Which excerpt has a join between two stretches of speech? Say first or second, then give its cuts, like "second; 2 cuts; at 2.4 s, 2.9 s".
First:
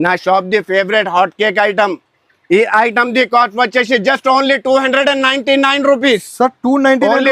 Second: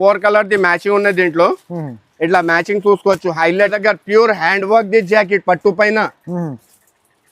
second; 1 cut; at 3.7 s